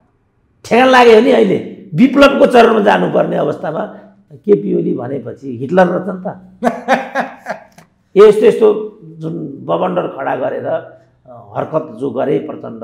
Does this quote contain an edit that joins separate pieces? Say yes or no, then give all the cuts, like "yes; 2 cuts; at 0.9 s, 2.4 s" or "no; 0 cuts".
no; 0 cuts